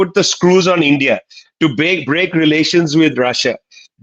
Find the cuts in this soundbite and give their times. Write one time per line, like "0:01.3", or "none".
none